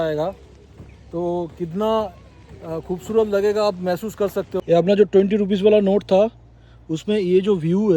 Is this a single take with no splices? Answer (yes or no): no